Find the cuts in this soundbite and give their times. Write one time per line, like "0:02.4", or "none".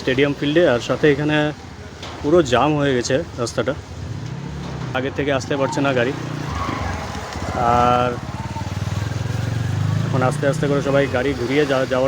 0:04.9